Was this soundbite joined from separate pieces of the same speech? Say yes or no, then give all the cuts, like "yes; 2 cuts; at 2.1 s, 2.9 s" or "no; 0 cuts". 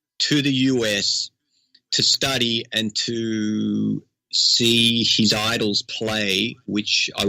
no; 0 cuts